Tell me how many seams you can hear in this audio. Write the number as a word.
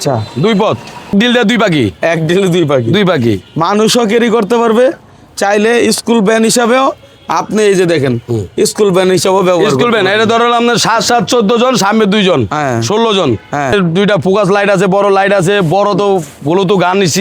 two